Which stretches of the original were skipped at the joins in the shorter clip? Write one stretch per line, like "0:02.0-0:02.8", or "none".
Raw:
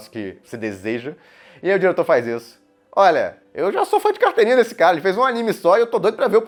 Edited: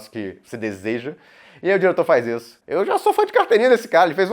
0:02.6-0:03.4